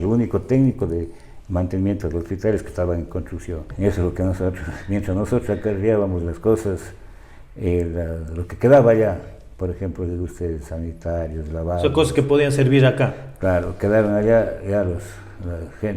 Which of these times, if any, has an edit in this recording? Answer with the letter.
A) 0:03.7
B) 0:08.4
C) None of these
A